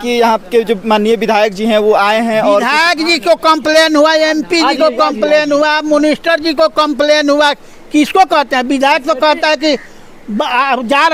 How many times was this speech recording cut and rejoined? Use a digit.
0